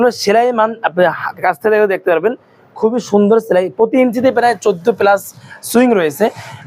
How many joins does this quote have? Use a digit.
0